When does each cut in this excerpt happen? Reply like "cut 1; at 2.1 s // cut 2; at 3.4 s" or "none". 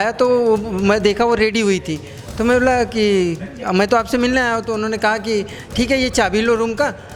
none